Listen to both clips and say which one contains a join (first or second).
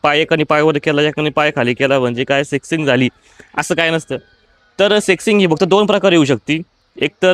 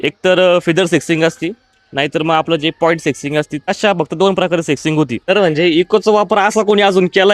second